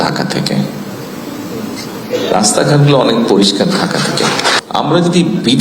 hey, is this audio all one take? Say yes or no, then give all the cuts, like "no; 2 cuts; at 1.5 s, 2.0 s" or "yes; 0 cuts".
no; 1 cut; at 4.6 s